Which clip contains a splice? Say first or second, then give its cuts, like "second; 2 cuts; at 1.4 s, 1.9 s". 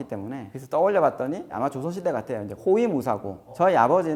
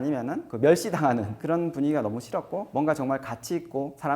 second; 1 cut; at 1.3 s